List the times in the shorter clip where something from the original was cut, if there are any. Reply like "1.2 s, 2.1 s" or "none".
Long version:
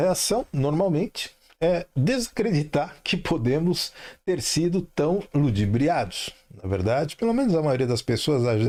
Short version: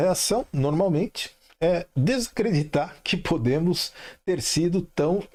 none